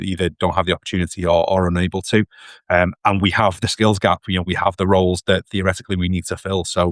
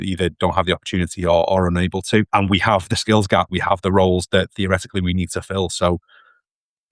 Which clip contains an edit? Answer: second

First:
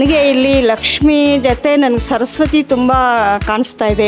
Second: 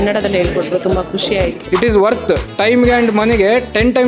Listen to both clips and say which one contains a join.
second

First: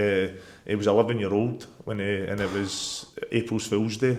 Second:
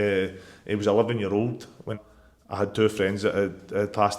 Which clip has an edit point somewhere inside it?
second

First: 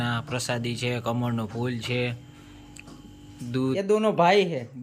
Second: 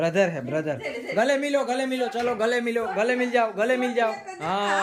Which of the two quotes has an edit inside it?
first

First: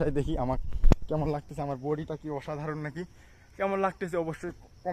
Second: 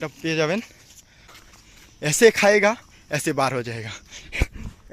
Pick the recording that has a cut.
second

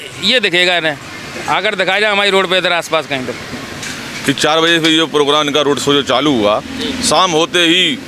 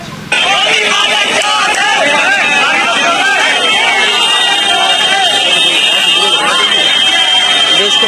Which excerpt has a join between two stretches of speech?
first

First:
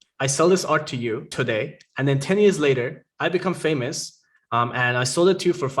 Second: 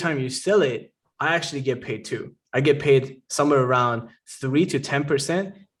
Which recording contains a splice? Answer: first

